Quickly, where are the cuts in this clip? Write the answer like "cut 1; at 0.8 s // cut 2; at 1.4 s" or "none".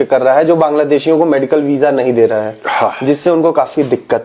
none